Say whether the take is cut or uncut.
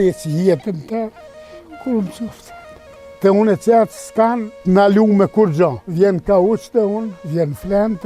cut